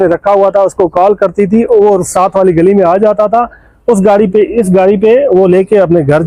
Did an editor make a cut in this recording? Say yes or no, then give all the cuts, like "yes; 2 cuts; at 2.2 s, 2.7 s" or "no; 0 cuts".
no; 0 cuts